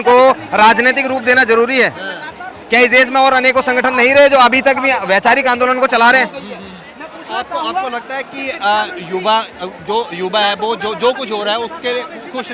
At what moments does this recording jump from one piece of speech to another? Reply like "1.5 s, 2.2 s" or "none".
none